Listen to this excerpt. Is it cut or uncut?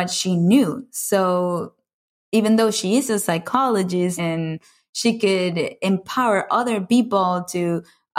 cut